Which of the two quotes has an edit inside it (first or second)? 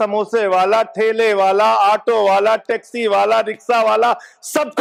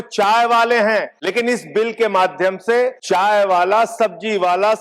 second